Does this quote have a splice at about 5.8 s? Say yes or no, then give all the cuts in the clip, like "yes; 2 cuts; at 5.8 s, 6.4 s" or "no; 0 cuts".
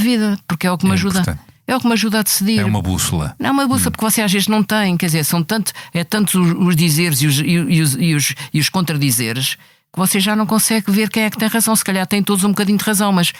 no; 0 cuts